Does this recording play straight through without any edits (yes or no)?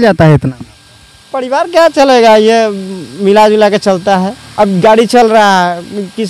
no